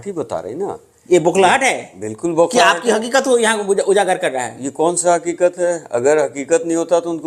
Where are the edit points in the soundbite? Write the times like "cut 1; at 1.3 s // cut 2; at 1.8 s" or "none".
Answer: none